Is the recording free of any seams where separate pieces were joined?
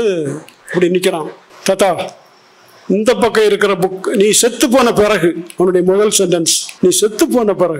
no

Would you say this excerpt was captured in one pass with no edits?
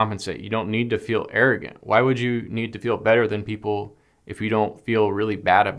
yes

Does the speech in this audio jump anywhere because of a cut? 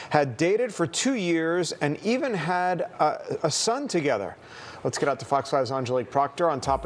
yes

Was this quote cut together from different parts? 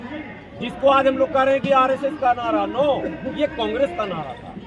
no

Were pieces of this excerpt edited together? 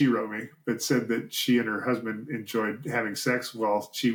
no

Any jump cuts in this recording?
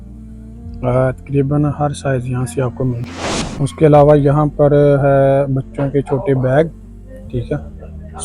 yes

